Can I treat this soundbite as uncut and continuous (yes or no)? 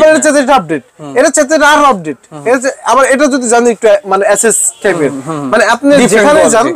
yes